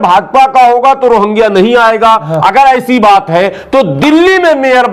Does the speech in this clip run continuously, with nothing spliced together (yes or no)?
yes